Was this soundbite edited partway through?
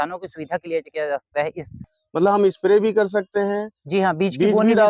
yes; 1 cut; at 1.7 s

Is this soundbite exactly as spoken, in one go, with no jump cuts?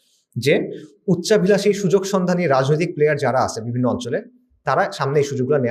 yes; 0 cuts

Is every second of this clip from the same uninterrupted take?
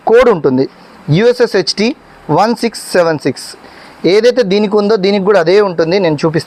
yes; 0 cuts

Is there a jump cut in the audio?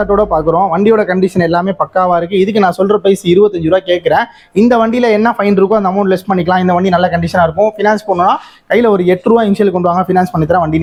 no; 0 cuts

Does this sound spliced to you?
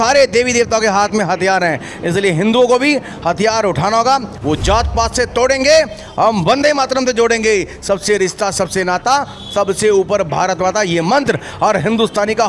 yes; 1 cut; at 4.3 s

